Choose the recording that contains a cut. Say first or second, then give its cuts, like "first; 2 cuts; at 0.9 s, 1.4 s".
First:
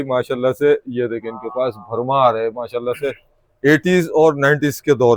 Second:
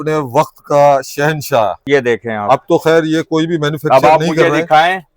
second; 1 cut; at 1.8 s